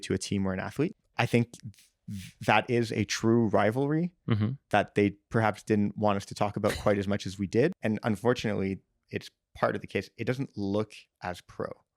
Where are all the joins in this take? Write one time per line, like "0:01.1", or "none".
0:01.0
0:07.8